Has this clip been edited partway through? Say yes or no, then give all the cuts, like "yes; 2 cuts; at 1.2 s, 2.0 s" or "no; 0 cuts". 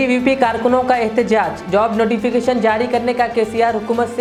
no; 0 cuts